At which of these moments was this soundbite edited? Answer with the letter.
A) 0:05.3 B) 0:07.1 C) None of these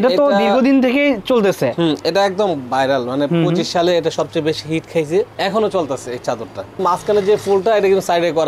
C